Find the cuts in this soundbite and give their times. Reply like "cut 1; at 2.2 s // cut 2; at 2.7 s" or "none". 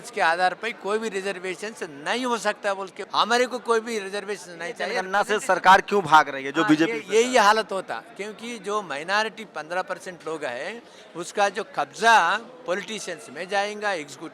cut 1; at 3.0 s // cut 2; at 5.0 s